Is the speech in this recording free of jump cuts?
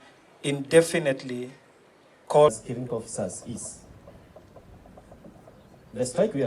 no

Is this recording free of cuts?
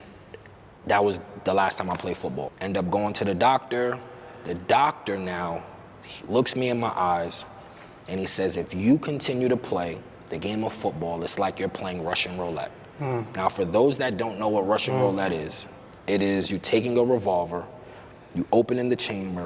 no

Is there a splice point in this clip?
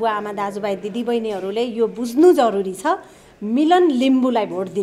no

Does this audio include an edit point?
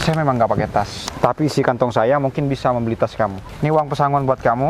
yes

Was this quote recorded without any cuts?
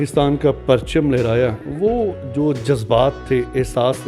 yes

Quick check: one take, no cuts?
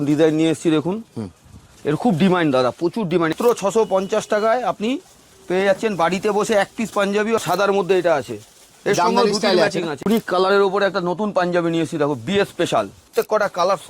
no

